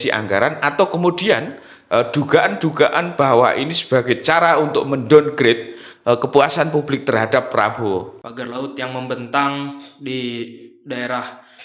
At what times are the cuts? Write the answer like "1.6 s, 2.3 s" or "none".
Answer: 8.2 s